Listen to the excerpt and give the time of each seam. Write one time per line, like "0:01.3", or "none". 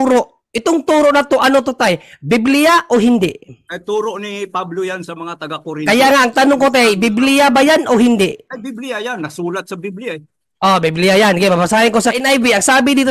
0:12.2